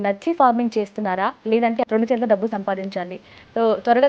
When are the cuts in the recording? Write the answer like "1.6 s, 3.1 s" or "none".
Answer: 1.8 s